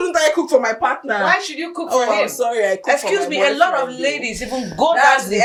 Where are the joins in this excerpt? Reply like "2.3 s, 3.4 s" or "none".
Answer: none